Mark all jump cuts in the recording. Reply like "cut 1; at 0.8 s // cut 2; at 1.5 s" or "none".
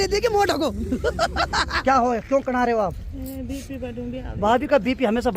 cut 1; at 1.7 s